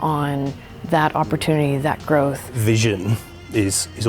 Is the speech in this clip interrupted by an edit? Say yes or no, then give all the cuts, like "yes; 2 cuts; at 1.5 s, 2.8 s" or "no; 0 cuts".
yes; 1 cut; at 2.5 s